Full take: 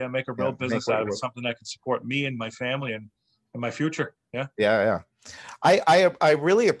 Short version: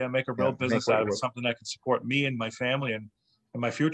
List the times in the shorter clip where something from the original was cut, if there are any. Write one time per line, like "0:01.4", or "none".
none